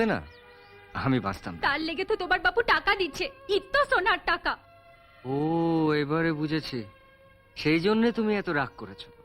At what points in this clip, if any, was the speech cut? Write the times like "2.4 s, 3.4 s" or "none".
1.5 s